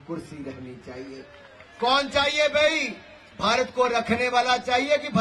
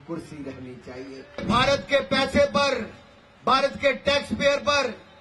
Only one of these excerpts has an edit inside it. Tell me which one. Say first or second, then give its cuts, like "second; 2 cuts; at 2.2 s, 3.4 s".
second; 1 cut; at 1.4 s